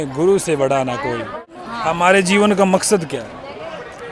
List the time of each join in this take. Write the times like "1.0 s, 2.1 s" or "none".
1.6 s